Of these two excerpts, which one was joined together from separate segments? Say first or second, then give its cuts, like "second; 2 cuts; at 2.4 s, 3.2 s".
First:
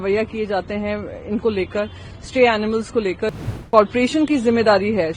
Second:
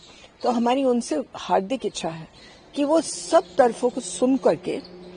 first; 1 cut; at 3.5 s